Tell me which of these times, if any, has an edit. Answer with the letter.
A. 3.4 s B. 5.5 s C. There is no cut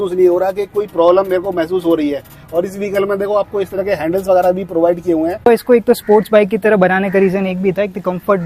B